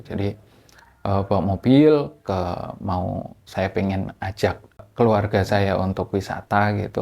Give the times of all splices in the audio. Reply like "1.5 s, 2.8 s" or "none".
4.9 s